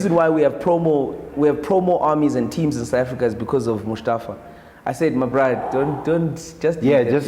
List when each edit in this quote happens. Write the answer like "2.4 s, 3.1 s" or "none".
none